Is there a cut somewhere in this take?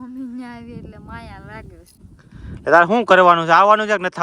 yes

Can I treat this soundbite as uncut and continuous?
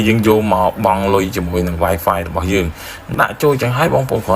no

